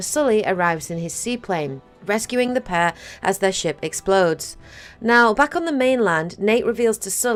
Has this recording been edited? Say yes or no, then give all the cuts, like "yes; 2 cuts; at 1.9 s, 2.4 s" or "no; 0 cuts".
no; 0 cuts